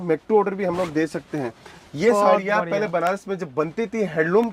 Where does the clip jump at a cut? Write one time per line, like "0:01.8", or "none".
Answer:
0:01.7